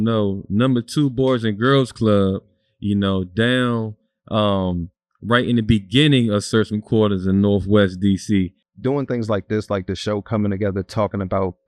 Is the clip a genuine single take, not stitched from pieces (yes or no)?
no